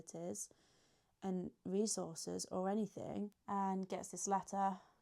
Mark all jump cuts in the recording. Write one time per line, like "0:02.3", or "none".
0:03.4